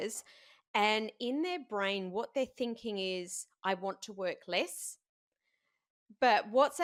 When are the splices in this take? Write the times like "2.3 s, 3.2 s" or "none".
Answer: none